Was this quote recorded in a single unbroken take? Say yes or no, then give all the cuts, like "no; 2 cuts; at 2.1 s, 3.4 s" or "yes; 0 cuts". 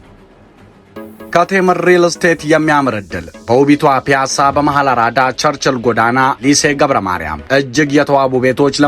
no; 1 cut; at 0.9 s